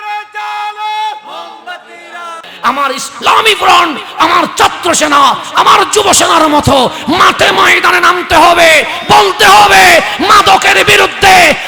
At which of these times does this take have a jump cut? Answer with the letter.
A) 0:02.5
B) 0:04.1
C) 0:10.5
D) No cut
A